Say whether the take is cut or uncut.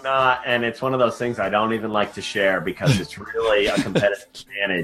uncut